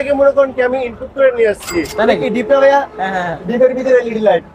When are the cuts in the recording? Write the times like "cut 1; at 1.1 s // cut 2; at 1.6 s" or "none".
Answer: cut 1; at 2.0 s